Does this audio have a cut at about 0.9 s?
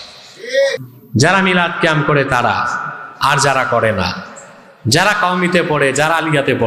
yes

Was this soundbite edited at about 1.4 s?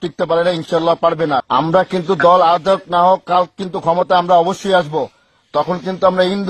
yes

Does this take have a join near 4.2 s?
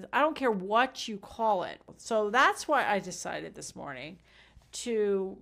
no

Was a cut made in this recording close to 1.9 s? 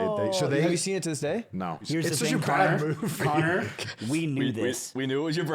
yes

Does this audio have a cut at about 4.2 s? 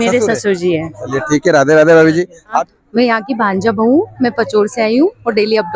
no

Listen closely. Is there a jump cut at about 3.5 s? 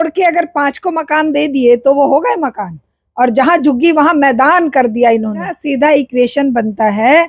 no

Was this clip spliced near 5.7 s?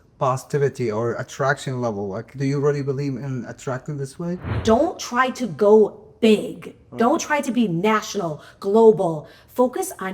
no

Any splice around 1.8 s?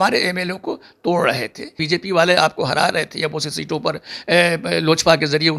yes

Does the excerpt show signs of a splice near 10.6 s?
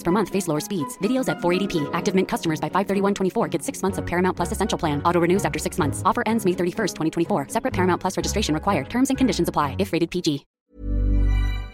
yes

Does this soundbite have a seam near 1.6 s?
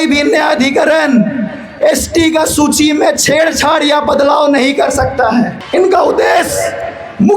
no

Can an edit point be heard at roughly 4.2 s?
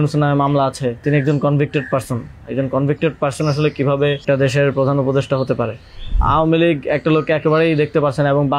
yes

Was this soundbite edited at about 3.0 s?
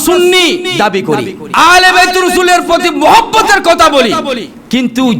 no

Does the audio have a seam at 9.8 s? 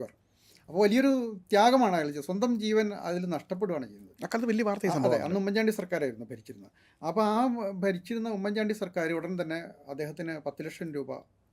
no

